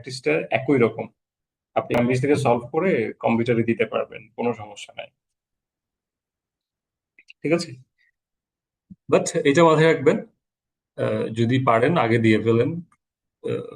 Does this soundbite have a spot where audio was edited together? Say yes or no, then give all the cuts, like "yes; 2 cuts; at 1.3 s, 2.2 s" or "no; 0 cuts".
yes; 1 cut; at 2.0 s